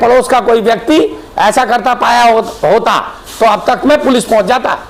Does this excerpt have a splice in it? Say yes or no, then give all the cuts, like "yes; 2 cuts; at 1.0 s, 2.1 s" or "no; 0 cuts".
no; 0 cuts